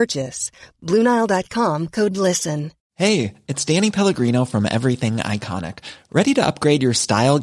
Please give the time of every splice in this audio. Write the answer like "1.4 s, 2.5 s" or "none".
2.8 s